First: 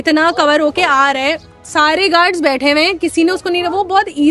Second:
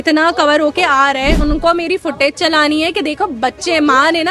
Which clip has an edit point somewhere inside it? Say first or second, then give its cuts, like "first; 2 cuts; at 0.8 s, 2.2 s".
second; 1 cut; at 1.4 s